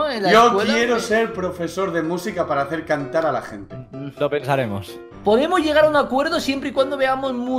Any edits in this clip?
no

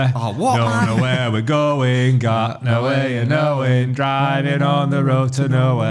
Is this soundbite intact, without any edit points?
yes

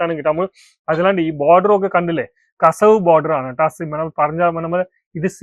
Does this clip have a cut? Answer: no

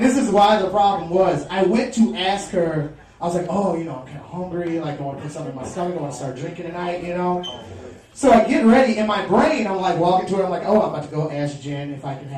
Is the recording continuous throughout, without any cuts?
no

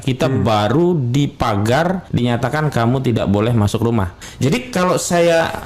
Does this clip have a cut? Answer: yes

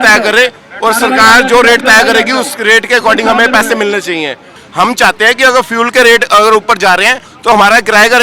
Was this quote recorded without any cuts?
no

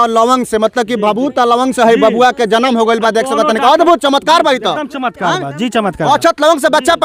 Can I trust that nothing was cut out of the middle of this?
yes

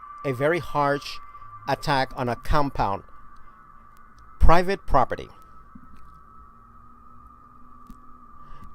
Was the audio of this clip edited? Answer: yes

